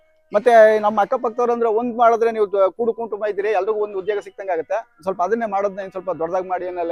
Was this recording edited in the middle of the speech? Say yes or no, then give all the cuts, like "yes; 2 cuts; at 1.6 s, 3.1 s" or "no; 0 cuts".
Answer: no; 0 cuts